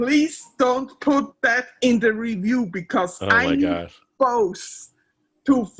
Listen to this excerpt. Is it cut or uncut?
uncut